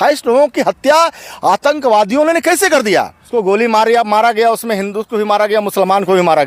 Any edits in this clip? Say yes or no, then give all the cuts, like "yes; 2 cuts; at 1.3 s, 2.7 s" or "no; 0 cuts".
yes; 1 cut; at 3.2 s